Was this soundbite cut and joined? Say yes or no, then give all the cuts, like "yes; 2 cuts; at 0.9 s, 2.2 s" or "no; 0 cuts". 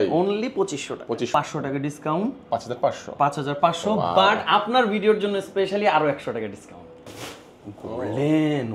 yes; 2 cuts; at 1.3 s, 7.0 s